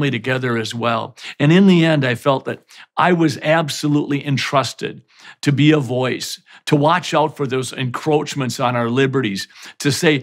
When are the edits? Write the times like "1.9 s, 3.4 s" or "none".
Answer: none